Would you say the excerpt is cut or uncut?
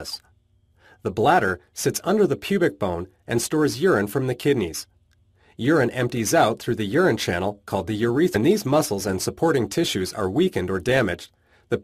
uncut